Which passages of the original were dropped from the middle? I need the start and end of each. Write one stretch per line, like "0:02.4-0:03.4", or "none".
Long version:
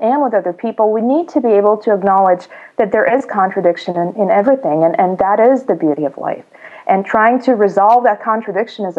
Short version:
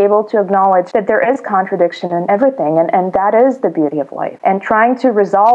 0:02.4-0:02.7
0:04.1-0:04.3
0:06.3-0:06.7